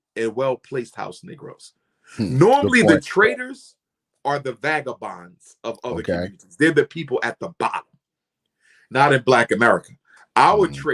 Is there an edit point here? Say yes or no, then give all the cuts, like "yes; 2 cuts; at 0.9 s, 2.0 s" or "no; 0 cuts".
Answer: no; 0 cuts